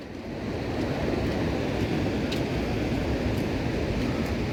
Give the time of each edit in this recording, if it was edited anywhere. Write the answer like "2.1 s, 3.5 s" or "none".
none